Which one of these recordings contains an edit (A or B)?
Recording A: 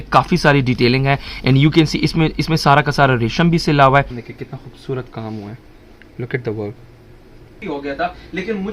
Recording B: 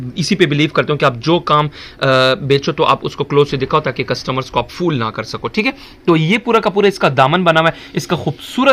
A